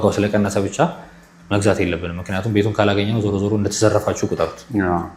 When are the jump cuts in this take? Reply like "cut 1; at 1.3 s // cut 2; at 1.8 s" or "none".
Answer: none